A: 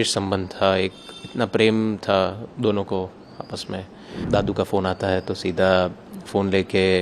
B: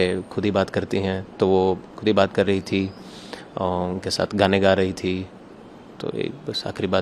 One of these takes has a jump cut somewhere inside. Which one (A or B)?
A